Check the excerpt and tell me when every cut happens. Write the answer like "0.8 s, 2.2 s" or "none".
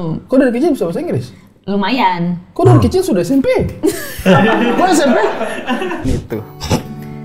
6.0 s